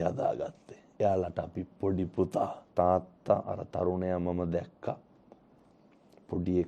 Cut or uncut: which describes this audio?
cut